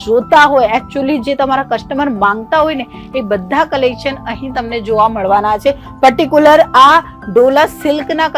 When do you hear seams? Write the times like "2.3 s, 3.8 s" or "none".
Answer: none